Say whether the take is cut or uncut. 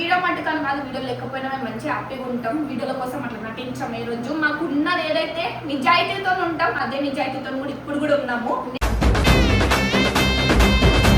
uncut